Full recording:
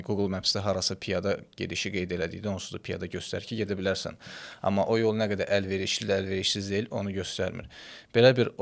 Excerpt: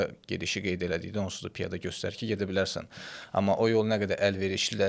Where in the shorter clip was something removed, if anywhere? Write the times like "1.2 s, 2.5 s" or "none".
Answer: none